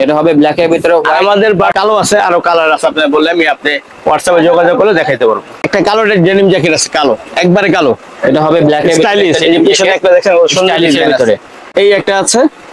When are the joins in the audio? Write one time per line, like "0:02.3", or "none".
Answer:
0:01.7
0:05.6
0:11.6